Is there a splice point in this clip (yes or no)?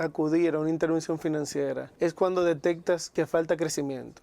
yes